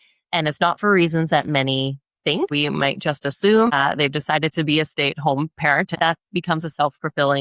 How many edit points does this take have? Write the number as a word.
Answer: three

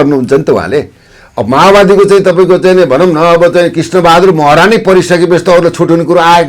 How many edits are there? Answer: zero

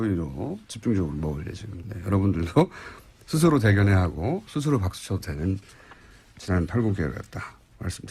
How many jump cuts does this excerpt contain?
one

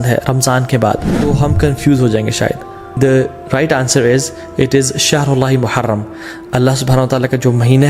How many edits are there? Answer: two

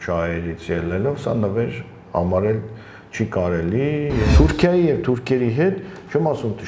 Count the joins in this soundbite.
one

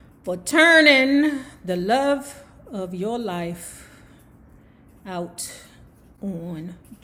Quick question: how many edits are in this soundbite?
zero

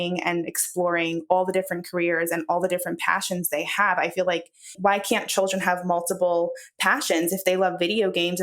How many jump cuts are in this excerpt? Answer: one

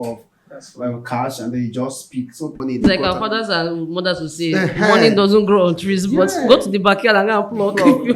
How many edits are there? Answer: one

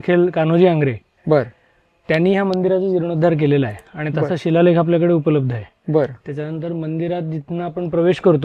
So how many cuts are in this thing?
zero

